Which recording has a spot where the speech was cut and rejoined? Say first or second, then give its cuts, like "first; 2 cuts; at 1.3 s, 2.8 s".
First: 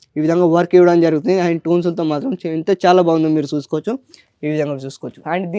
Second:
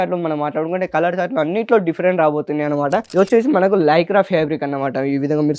second; 1 cut; at 3.1 s